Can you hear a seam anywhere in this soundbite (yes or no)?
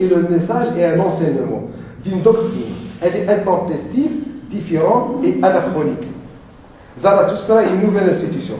no